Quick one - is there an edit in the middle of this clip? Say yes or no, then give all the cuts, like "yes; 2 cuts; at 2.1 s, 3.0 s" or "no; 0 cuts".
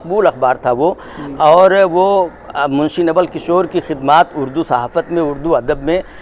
no; 0 cuts